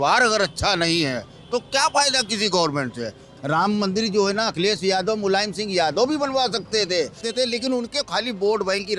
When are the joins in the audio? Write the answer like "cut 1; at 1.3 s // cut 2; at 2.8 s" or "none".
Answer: cut 1; at 3.2 s // cut 2; at 7.2 s

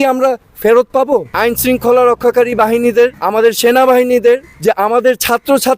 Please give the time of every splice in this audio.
cut 1; at 1.3 s // cut 2; at 3.2 s // cut 3; at 4.5 s

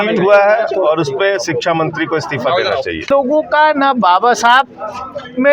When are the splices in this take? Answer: cut 1; at 3.1 s

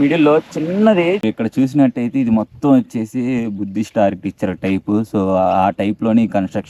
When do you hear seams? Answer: cut 1; at 1.2 s

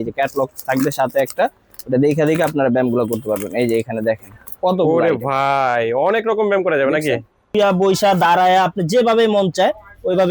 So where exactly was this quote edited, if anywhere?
cut 1; at 7.5 s

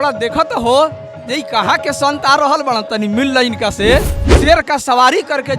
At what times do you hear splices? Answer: cut 1; at 4.3 s

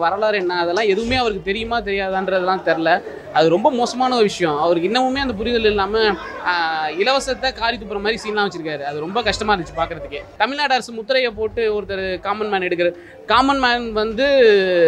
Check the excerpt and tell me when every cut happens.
none

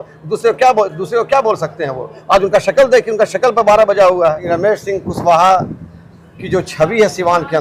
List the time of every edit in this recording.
cut 1; at 4.4 s

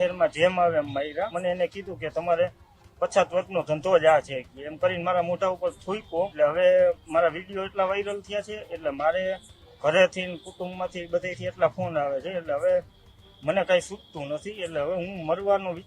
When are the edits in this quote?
cut 1; at 1.3 s // cut 2; at 6.3 s

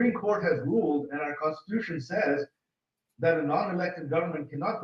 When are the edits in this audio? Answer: none

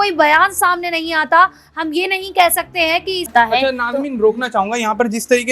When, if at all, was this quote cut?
cut 1; at 3.3 s

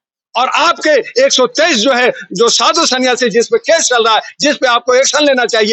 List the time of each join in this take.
none

